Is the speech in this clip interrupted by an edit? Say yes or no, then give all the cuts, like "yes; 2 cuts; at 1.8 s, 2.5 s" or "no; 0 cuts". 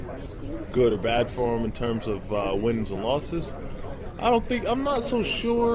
yes; 1 cut; at 2.8 s